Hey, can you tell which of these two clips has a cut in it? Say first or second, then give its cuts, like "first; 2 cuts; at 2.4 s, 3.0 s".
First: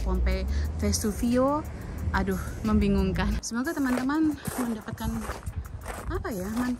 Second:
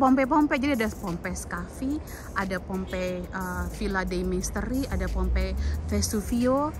first; 1 cut; at 3.4 s